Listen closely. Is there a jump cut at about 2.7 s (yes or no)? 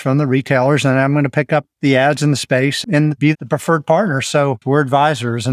no